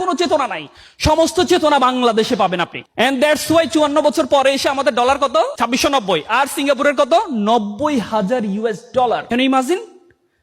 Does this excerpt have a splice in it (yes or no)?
yes